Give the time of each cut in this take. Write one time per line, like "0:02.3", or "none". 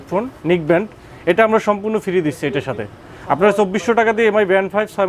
none